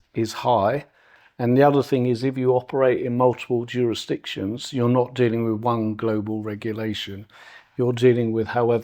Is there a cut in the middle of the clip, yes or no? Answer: no